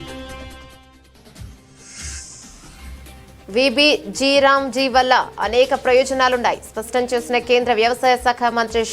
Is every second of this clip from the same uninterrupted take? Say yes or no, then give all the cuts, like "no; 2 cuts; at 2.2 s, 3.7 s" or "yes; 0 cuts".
yes; 0 cuts